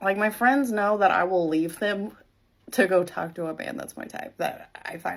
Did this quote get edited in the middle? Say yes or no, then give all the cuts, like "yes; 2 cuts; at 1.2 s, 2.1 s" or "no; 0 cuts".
no; 0 cuts